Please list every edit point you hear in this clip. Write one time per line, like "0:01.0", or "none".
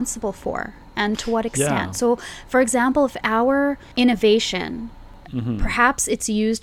0:03.8
0:05.2